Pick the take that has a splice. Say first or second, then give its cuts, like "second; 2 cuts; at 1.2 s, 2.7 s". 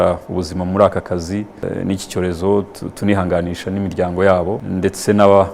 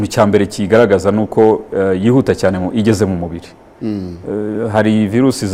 first; 2 cuts; at 1.6 s, 4.6 s